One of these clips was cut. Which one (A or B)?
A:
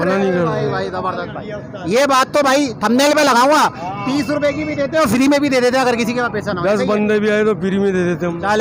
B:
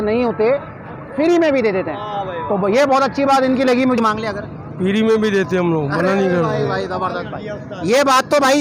B